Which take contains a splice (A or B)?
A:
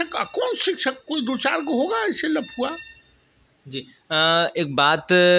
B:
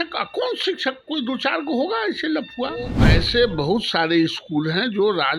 B